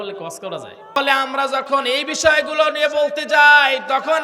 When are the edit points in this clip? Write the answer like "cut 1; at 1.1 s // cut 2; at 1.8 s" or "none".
cut 1; at 1.0 s